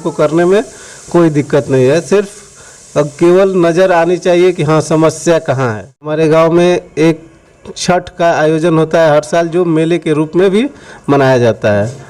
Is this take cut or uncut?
cut